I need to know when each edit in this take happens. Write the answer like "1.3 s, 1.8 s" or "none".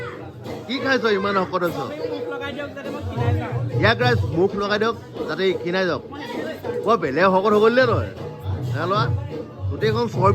none